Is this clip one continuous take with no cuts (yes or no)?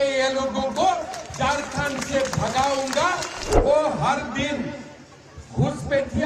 no